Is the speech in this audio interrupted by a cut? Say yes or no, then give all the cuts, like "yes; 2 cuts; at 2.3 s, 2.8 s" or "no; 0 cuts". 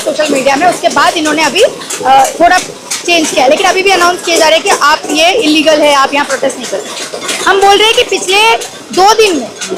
no; 0 cuts